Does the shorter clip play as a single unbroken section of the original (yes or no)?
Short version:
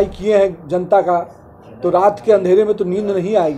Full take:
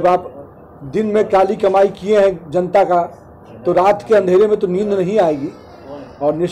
yes